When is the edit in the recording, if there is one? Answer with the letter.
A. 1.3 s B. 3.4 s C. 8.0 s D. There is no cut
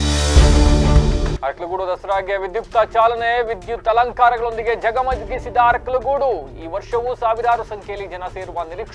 D